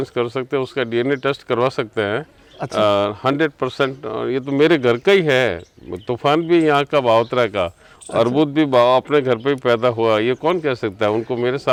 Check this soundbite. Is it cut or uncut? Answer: uncut